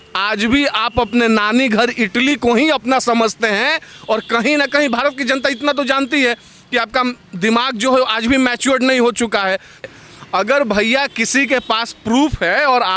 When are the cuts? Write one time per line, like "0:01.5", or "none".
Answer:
0:09.8

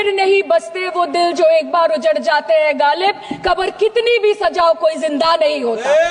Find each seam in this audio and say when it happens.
none

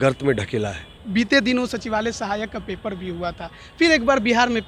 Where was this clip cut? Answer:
0:01.0

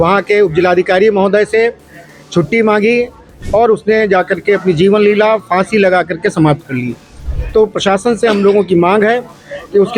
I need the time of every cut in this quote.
0:03.3
0:07.2

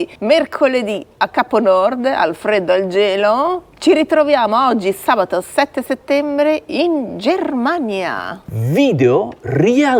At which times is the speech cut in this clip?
none

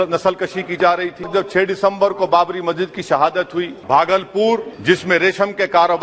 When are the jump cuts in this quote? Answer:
0:01.3
0:03.8
0:04.7

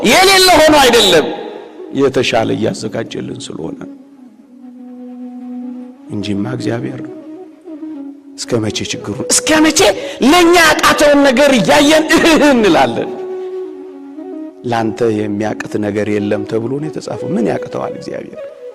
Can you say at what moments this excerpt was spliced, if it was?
none

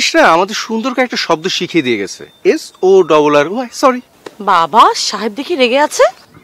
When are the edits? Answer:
0:04.1

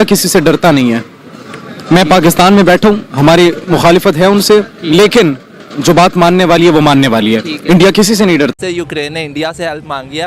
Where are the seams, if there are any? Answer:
0:08.5

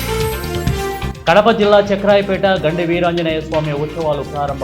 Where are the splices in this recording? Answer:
0:01.1

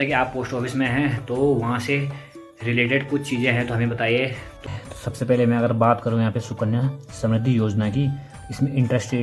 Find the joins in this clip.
0:04.7

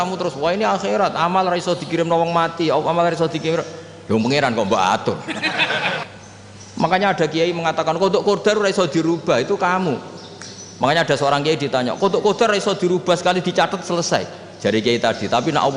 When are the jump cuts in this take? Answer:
0:06.0

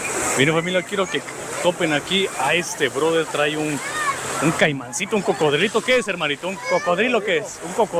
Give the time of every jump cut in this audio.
none

